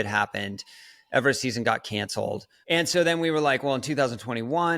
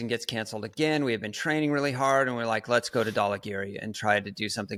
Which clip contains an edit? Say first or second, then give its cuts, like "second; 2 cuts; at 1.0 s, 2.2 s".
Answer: first; 1 cut; at 2.5 s